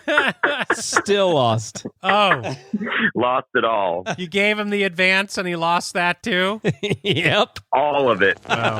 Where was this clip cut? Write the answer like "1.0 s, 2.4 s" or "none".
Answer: none

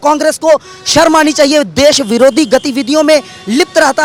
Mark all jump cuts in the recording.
none

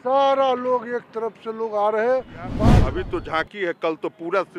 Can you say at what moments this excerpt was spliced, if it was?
2.6 s

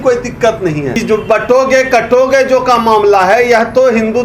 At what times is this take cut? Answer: 1.0 s

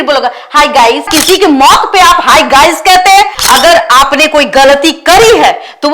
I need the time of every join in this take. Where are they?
1.1 s, 3.4 s

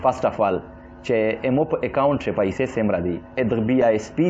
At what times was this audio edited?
3.4 s

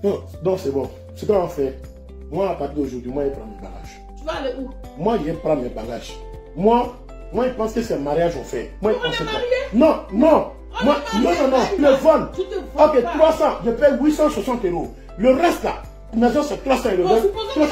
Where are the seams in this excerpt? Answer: 11.8 s

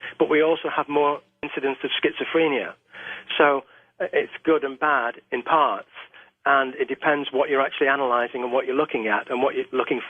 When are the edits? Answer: 6.4 s

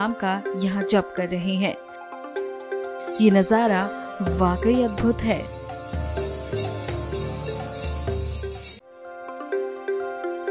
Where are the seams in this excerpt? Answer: 9.0 s

